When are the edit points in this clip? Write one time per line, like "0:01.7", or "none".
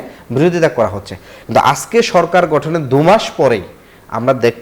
none